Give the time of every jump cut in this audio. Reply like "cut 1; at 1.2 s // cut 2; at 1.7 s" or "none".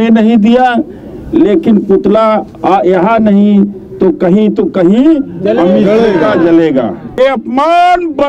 cut 1; at 7.2 s